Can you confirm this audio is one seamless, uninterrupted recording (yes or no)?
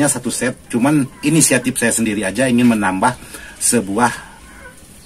yes